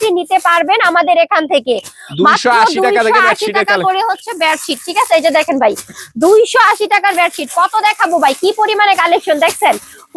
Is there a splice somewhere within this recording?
no; 0 cuts

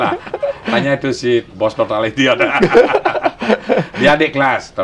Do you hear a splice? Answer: no; 0 cuts

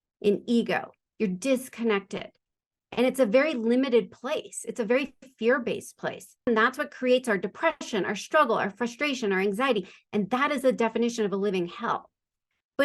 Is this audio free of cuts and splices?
no; 1 cut; at 6.5 s

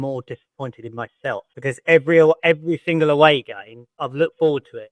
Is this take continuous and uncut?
no; 2 cuts; at 1.5 s, 4.0 s

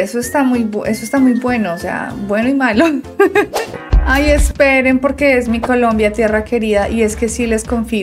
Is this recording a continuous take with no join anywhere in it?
no; 1 cut; at 3.7 s

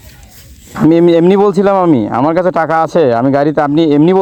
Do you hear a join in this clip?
no; 0 cuts

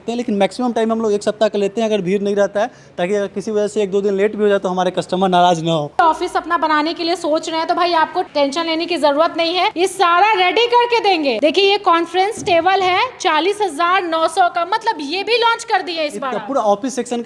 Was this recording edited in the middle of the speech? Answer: no; 0 cuts

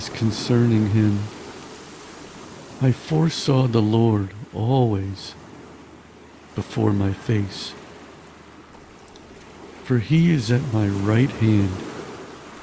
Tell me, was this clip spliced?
no; 0 cuts

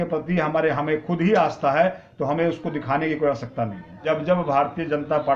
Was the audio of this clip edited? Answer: yes; 1 cut; at 4.0 s

